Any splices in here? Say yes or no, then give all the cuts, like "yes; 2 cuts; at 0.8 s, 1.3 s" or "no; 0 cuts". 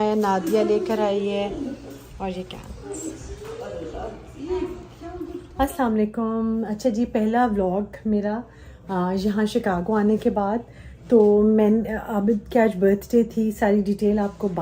no; 0 cuts